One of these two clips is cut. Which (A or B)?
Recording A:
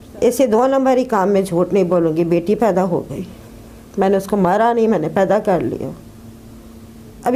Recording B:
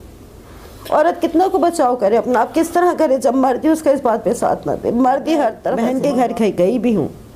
B